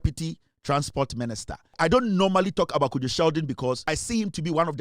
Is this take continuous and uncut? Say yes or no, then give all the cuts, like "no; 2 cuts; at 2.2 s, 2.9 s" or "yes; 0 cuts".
no; 2 cuts; at 1.8 s, 3.8 s